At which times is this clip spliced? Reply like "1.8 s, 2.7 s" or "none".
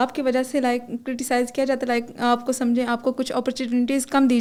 none